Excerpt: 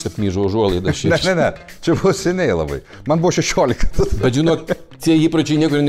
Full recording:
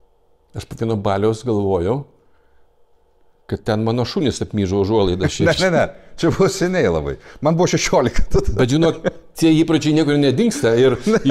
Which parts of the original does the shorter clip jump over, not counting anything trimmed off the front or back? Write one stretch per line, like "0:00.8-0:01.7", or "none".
none